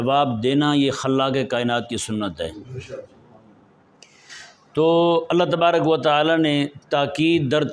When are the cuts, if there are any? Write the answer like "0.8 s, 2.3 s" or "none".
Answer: none